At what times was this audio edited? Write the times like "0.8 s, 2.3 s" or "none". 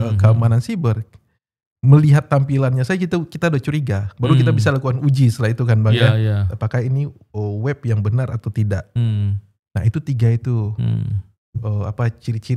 none